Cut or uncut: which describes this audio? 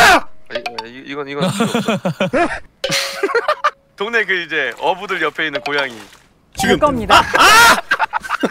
cut